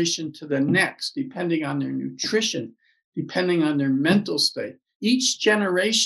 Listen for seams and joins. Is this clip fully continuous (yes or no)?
no